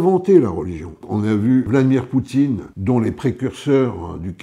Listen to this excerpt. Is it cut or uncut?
cut